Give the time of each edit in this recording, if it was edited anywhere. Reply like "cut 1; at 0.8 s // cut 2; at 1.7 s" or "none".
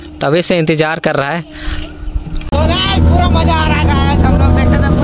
cut 1; at 2.4 s